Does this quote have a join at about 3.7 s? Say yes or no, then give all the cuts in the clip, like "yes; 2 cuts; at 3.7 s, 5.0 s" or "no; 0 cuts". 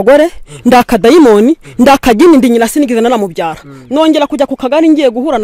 no; 0 cuts